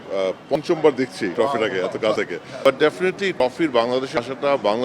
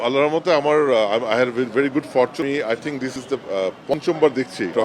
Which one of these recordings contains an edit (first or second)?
first